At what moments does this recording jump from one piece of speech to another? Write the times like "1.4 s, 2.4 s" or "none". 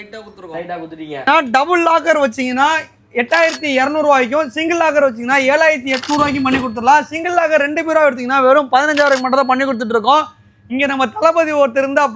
1.3 s

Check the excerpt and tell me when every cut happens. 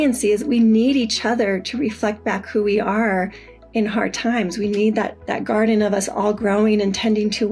5.2 s

